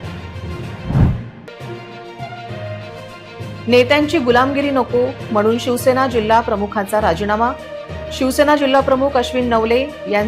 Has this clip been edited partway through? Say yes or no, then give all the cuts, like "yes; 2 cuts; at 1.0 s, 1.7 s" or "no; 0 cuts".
no; 0 cuts